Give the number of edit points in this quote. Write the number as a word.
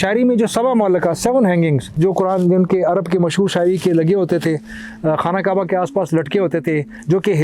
one